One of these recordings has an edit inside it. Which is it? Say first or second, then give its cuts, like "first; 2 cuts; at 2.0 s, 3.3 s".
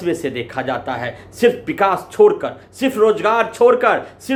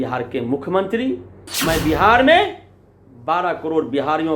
second; 1 cut; at 1.5 s